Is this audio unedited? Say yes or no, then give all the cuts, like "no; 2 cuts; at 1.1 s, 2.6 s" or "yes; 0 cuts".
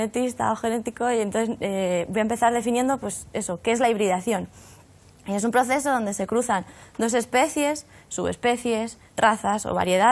yes; 0 cuts